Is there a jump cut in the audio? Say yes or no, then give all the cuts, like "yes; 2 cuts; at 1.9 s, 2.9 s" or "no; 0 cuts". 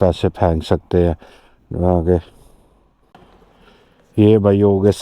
yes; 1 cut; at 3.1 s